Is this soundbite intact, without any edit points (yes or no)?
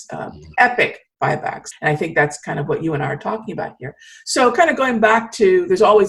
no